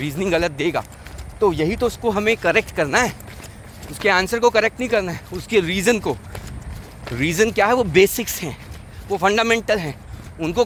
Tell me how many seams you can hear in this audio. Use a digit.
0